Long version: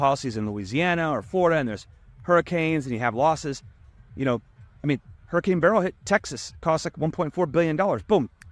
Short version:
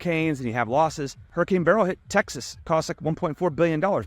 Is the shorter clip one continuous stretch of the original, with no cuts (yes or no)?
no